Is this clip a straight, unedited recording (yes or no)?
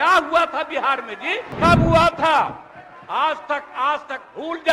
no